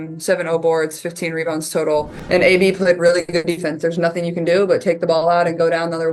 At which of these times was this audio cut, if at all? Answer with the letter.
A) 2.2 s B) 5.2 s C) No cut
A